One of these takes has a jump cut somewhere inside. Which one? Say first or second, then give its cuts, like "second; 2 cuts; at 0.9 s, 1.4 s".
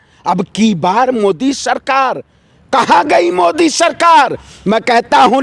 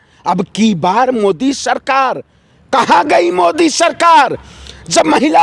first; 1 cut; at 4.5 s